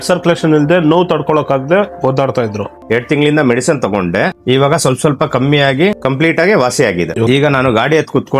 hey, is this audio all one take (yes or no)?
no